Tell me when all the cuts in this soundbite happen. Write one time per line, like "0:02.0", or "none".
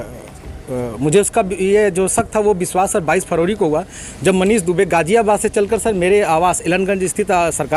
none